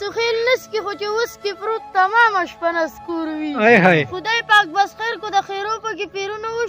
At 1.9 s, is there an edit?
no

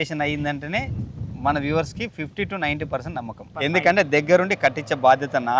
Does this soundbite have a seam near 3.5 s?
yes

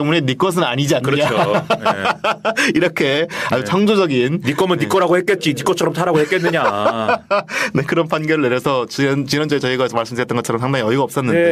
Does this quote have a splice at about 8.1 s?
no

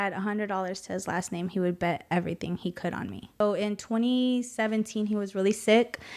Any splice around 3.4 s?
yes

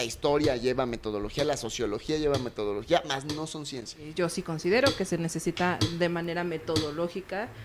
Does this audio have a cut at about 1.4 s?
no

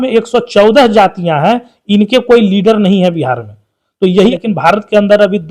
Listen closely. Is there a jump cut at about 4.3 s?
yes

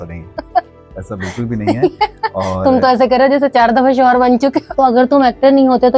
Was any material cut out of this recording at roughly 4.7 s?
yes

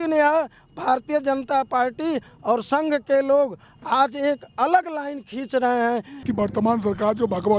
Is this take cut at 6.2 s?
yes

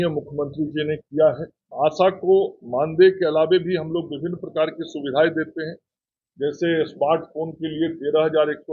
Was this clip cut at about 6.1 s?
no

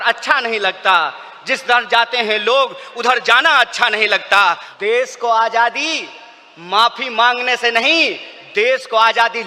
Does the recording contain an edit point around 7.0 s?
no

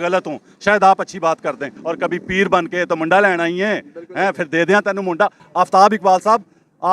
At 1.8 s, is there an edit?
yes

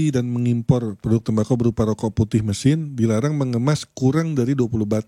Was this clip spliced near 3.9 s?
no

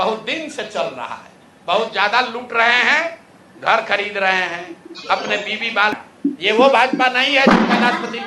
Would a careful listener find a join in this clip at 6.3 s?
yes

